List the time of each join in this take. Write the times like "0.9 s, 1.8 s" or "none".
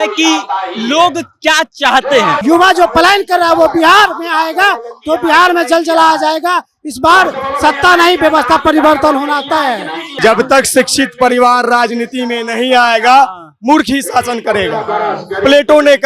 2.4 s, 10.2 s